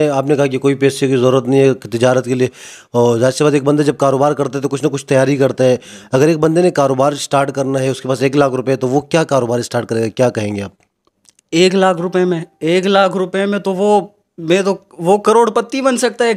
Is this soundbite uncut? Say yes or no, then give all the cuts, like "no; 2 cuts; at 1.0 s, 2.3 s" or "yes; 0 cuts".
yes; 0 cuts